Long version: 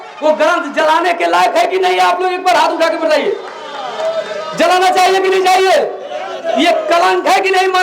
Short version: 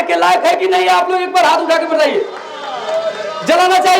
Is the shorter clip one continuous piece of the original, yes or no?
yes